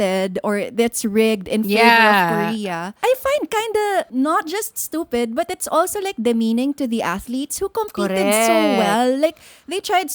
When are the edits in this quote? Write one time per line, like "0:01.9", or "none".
0:03.0
0:04.1